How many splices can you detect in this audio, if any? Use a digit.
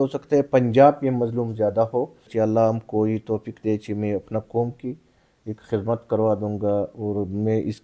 1